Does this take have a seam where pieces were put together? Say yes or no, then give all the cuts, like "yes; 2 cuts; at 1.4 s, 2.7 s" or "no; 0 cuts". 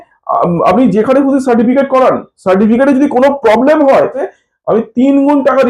yes; 1 cut; at 4.2 s